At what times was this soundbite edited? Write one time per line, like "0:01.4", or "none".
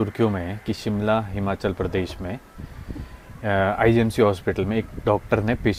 none

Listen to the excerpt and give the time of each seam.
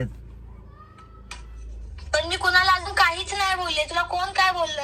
none

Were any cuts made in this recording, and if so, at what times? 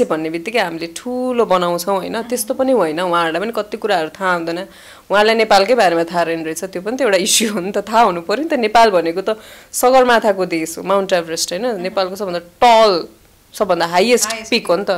none

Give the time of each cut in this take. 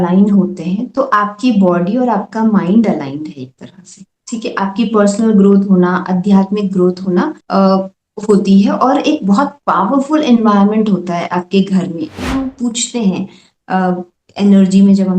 0:12.2

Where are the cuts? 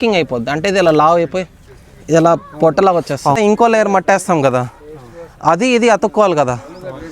0:03.4

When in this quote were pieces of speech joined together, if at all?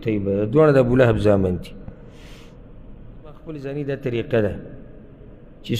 0:03.6

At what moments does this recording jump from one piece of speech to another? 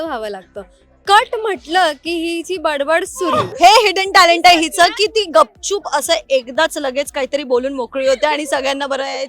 0:03.4

